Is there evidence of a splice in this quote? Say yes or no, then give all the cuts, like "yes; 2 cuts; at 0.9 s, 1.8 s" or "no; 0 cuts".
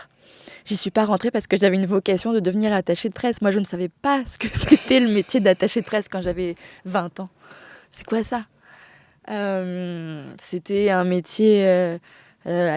no; 0 cuts